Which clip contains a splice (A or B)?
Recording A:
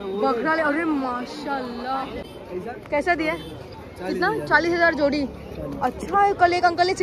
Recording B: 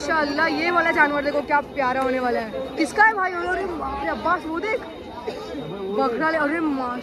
A